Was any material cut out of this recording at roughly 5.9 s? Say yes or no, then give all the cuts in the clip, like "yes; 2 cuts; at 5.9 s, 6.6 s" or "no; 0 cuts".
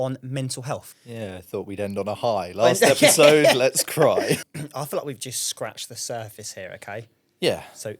no; 2 cuts; at 1.0 s, 4.4 s